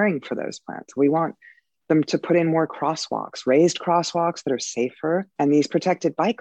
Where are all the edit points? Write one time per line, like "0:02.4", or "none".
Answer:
0:05.3